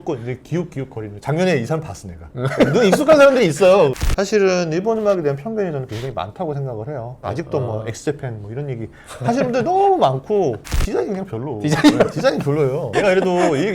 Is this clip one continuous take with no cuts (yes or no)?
no